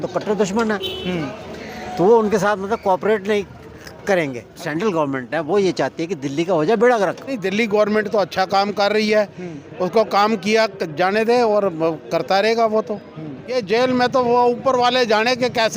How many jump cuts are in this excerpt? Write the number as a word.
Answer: three